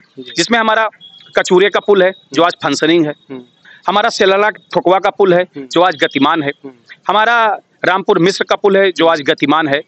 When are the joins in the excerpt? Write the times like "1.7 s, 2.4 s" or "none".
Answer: none